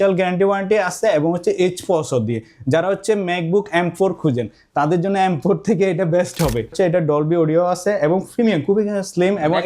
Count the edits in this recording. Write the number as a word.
one